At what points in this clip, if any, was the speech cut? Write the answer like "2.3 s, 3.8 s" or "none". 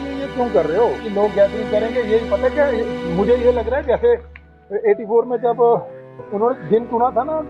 1.0 s